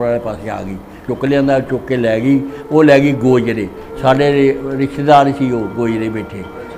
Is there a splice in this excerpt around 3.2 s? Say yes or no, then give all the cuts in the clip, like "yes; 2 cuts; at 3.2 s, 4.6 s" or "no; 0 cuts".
no; 1 cut; at 1.1 s